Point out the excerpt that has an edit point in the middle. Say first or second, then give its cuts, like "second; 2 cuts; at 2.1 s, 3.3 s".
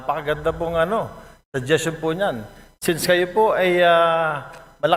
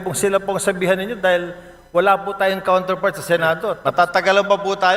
second; 1 cut; at 3.8 s